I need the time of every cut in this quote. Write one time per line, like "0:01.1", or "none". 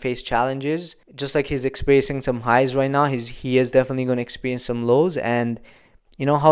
none